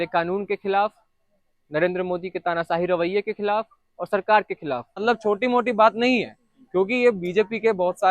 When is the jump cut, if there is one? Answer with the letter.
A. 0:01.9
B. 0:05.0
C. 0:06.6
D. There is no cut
B